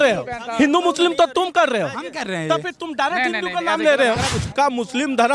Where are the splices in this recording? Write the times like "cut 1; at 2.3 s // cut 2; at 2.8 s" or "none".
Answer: cut 1; at 4.3 s